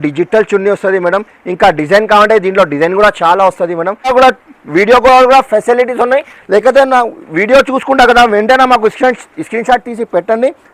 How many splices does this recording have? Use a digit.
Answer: 1